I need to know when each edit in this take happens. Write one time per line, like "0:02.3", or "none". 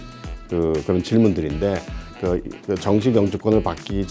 0:02.1